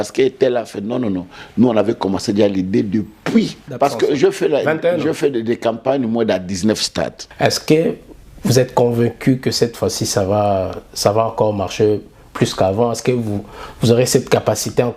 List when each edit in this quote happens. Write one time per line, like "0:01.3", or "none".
0:03.6
0:07.2